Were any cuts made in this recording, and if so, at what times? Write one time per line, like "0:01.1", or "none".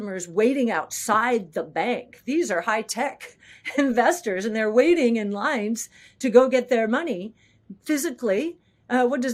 none